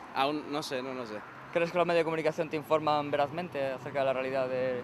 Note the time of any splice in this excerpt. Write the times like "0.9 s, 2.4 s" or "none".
3.8 s